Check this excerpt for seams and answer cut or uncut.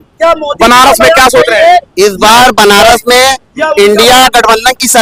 uncut